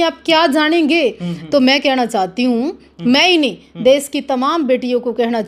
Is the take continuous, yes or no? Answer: yes